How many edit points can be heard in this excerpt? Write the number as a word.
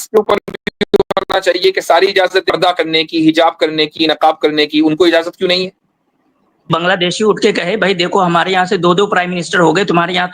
two